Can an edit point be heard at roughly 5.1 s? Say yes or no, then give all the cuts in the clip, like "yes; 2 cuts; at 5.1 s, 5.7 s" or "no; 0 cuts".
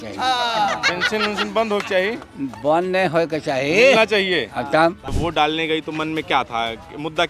yes; 1 cut; at 5.1 s